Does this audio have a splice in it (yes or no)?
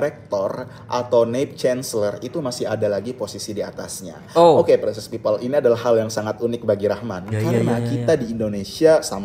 no